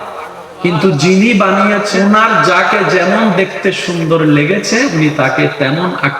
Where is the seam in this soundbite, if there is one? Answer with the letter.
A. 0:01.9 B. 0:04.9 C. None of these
A